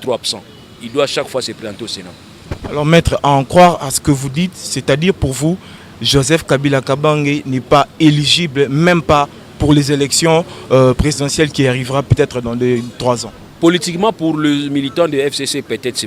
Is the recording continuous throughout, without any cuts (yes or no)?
yes